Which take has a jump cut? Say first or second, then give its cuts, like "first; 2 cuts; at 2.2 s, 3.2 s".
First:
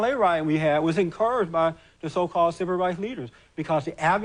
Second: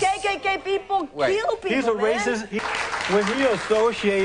second; 1 cut; at 2.6 s